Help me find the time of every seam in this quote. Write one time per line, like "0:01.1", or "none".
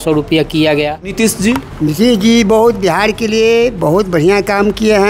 0:01.1